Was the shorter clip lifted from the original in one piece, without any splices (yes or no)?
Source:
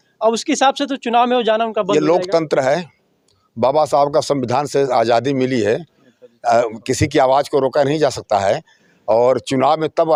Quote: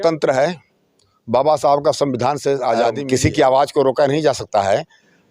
no